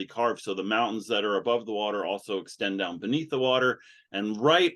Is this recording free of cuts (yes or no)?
yes